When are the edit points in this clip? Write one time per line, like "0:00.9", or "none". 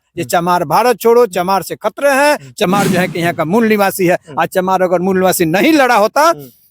0:02.6